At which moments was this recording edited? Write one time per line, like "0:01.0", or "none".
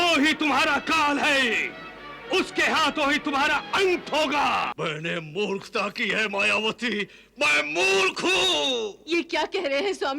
0:04.7

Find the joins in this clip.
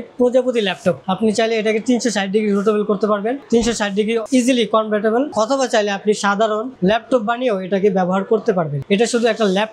0:01.1
0:05.3
0:08.8

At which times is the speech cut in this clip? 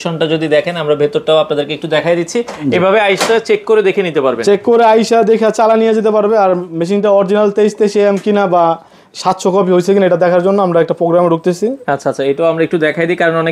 none

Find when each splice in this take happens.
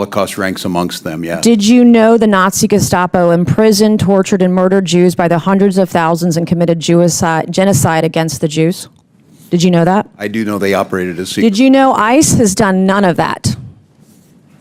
none

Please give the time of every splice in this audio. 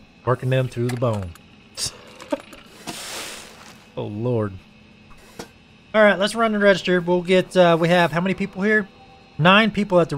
none

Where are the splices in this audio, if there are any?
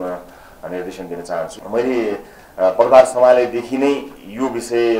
0:01.6

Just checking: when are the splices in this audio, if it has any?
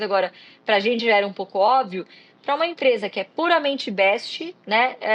none

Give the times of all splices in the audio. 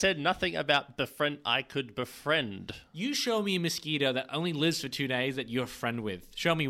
none

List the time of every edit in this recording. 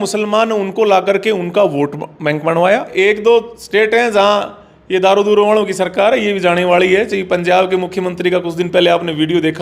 0:02.9

